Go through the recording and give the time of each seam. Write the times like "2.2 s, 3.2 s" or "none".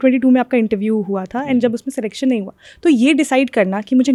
none